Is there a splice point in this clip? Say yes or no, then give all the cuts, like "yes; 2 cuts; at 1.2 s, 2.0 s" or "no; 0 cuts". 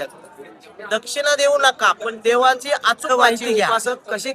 yes; 1 cut; at 3.4 s